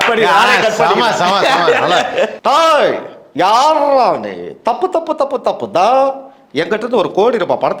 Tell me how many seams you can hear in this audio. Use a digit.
1